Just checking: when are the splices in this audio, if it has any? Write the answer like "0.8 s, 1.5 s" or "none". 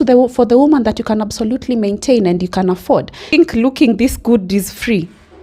3.3 s